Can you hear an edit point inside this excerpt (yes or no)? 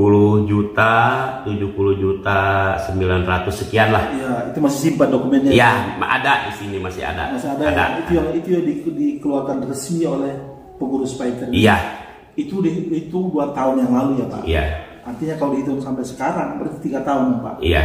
no